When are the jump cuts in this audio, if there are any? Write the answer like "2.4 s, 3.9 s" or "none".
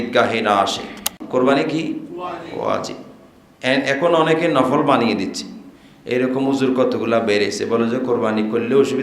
1.2 s